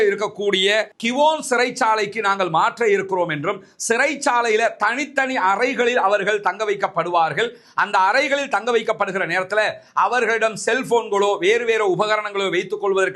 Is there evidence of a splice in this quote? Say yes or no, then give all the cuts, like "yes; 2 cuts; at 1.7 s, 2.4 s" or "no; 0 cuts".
no; 0 cuts